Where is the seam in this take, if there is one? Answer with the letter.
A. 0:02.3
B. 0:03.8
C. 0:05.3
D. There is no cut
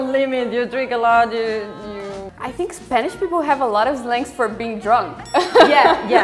A